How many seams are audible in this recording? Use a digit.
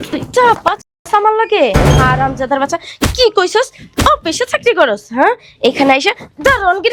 0